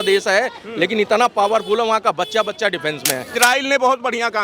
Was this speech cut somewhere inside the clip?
yes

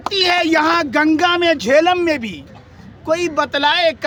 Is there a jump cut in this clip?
no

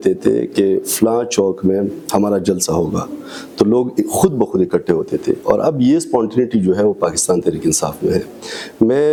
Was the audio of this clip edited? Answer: no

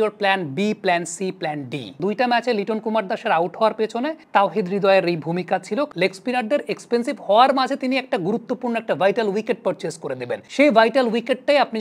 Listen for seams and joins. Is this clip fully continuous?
no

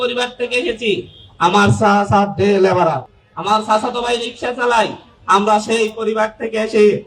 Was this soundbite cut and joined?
no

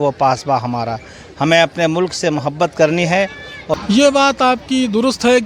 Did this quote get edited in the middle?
yes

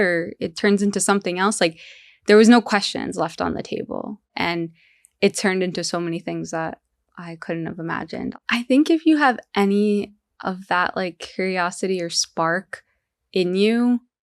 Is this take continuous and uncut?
no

